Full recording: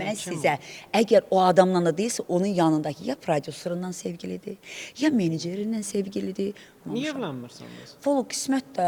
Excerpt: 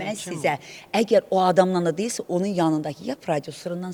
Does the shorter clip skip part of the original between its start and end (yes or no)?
no